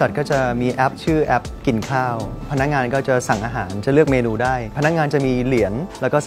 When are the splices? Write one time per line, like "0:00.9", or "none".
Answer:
none